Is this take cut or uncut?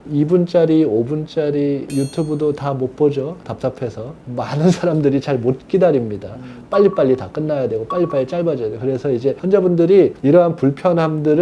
uncut